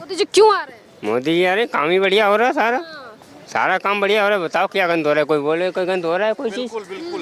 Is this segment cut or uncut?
uncut